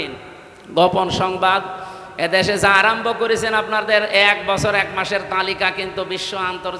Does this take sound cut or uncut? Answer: uncut